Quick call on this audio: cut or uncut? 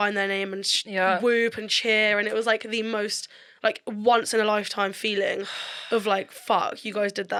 uncut